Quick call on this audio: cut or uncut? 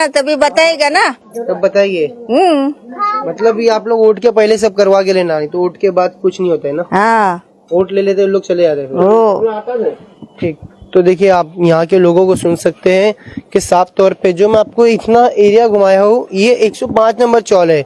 uncut